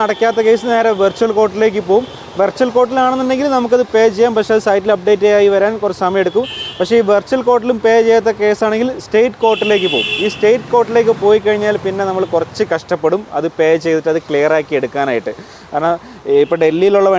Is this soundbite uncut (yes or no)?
yes